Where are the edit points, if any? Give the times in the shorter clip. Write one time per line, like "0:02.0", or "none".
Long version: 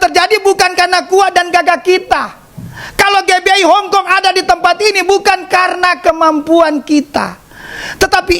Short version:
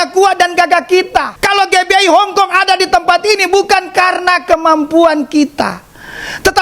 0:01.4